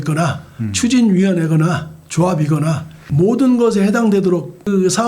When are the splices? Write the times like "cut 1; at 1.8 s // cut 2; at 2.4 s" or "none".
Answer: cut 1; at 3.0 s